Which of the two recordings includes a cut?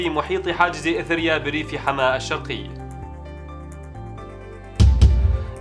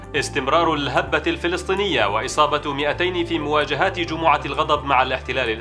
first; 2 cuts; at 2.7 s, 4.8 s

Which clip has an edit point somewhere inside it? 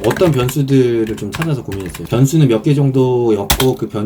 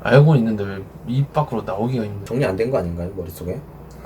second; 1 cut; at 2.2 s

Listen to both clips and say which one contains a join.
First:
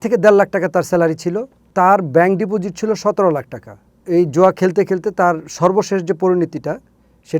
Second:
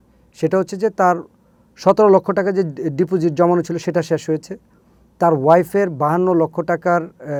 first; 2 cuts; at 1.7 s, 4.0 s

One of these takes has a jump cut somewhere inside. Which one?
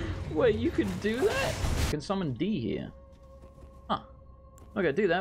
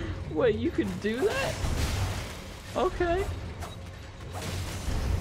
first; 1 cut; at 1.9 s

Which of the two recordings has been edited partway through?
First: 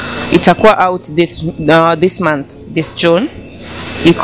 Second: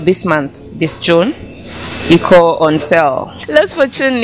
second; 1 cut; at 3.4 s

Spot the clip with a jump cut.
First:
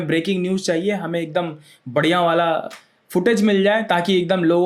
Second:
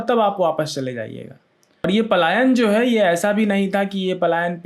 second; 1 cut; at 1.8 s

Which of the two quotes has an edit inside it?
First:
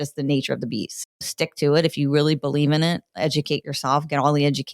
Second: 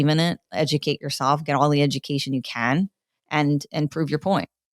first; 1 cut; at 0.9 s

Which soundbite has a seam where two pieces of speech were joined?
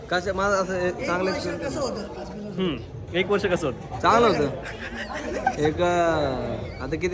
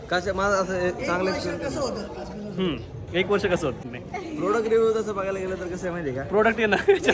second; 1 cut; at 3.9 s

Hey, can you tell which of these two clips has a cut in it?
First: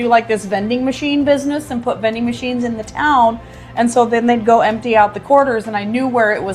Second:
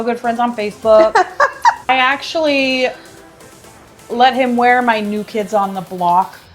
second; 1 cut; at 1.8 s

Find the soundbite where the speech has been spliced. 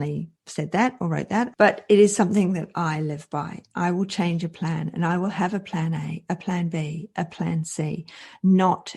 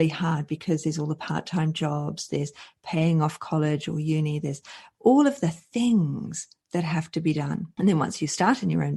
first; 1 cut; at 1.5 s

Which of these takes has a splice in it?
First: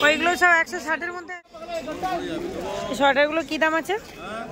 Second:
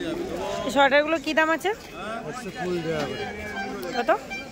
first; 1 cut; at 1.3 s

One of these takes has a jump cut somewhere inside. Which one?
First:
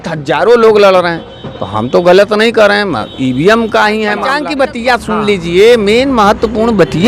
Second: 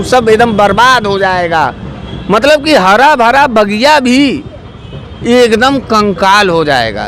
first; 1 cut; at 4.3 s

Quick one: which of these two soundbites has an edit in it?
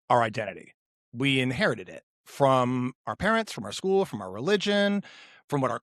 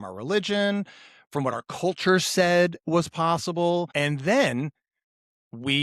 second; 1 cut; at 3.9 s

